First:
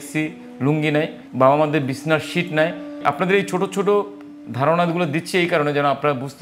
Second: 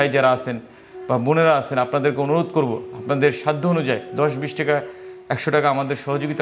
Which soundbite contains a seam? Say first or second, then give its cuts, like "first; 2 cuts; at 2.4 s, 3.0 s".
first; 2 cuts; at 1.2 s, 2.9 s